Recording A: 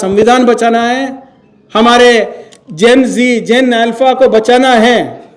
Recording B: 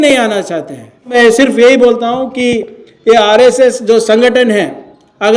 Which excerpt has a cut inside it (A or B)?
B